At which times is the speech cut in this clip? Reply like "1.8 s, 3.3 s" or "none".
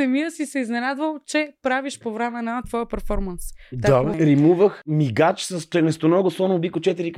4.1 s, 4.8 s